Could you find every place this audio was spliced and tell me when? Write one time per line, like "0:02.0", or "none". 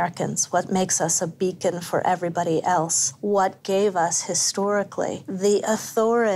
0:03.6
0:05.2